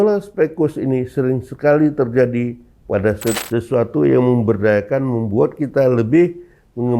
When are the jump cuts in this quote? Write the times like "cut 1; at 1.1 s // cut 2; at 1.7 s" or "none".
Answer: cut 1; at 3.4 s